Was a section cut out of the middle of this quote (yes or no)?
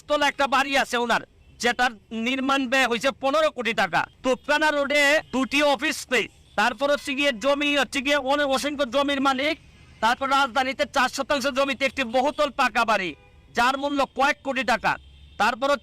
yes